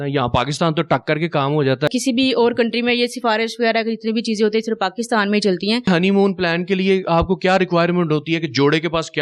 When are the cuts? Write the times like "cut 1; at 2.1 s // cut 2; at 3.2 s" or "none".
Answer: cut 1; at 1.9 s // cut 2; at 5.9 s